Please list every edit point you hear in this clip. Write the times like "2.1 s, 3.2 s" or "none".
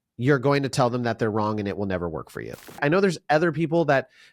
2.8 s